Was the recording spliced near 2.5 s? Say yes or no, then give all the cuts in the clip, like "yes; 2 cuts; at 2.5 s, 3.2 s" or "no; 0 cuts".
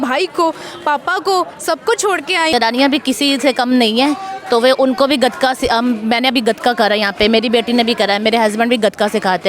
yes; 1 cut; at 2.5 s